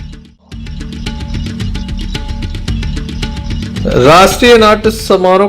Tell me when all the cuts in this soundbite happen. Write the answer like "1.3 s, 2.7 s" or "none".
1.1 s, 3.3 s